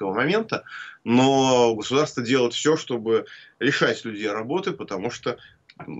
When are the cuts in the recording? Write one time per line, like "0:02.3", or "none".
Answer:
none